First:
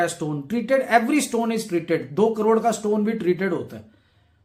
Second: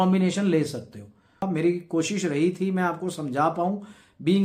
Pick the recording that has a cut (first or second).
second